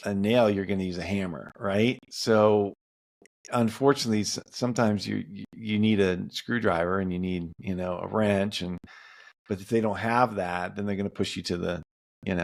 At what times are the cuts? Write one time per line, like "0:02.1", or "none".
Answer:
none